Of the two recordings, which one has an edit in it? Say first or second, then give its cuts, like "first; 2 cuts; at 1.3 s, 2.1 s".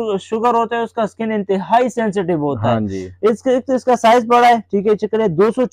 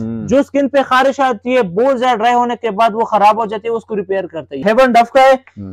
second; 1 cut; at 4.5 s